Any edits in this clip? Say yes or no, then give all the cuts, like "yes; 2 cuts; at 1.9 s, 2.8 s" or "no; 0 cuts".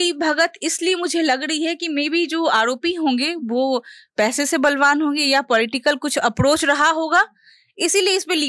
no; 0 cuts